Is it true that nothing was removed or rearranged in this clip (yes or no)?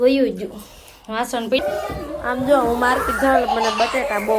no